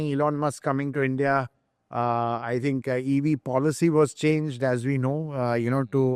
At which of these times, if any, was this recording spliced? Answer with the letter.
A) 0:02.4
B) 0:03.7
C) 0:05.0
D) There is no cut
D